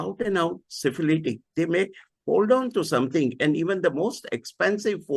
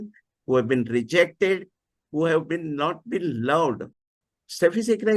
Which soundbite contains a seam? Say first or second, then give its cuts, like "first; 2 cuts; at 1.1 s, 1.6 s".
second; 1 cut; at 3.9 s